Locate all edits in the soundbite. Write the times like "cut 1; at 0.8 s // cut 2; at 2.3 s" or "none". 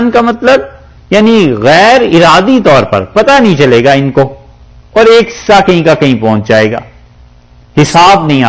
none